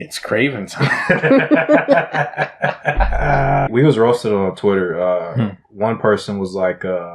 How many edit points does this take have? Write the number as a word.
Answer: one